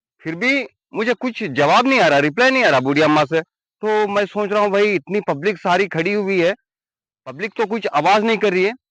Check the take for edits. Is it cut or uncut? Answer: uncut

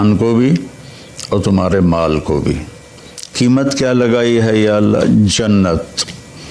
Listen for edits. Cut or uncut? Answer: uncut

